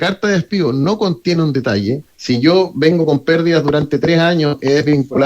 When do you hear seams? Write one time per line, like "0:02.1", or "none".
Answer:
0:02.1